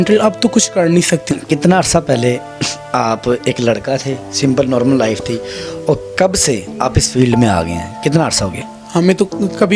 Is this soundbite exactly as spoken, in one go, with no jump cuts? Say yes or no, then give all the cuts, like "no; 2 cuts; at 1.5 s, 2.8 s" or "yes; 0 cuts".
no; 2 cuts; at 1.3 s, 8.8 s